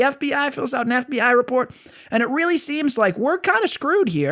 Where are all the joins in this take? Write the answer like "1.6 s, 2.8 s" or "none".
none